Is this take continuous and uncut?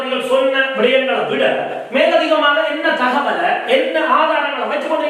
yes; 0 cuts

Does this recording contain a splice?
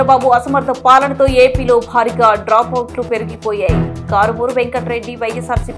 no; 0 cuts

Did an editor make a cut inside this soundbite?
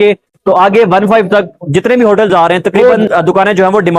yes; 1 cut; at 2.8 s

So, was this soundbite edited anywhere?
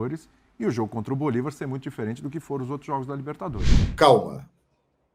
yes; 1 cut; at 3.7 s

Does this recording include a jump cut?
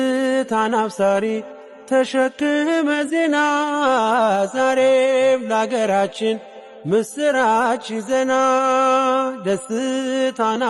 no; 0 cuts

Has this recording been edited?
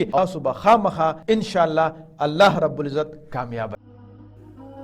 yes; 1 cut; at 3.8 s

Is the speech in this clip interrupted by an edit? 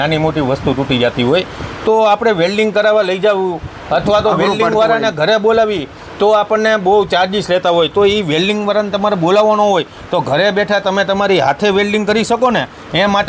no; 0 cuts

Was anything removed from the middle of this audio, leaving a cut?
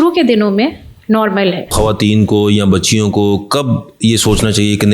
yes; 1 cut; at 1.7 s

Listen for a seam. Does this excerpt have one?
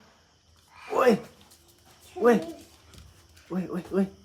no; 0 cuts

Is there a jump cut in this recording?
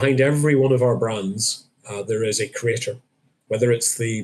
no; 0 cuts

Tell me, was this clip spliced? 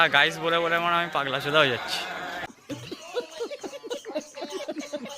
no; 0 cuts

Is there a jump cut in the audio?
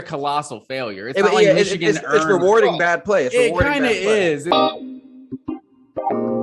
yes; 1 cut; at 4.5 s

